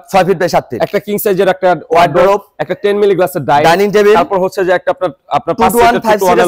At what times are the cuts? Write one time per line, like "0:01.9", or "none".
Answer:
none